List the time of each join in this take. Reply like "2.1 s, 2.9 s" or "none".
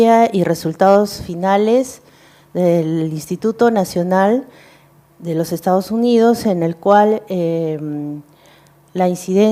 3.7 s